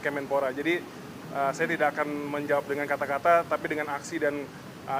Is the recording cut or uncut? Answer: uncut